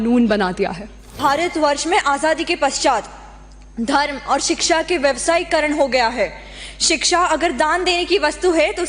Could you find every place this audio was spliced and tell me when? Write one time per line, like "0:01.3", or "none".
0:01.1